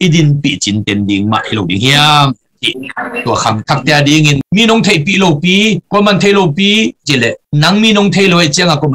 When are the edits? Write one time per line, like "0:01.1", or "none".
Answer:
0:07.4